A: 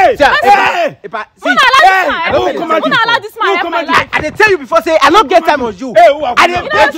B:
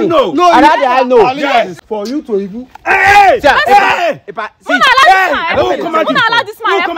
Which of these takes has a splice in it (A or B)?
B